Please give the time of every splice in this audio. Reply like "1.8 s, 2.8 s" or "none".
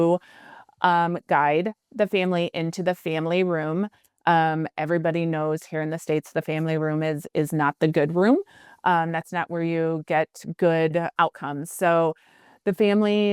11.1 s